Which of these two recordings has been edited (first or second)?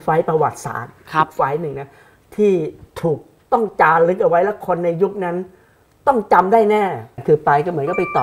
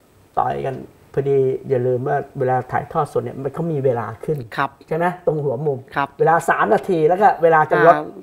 first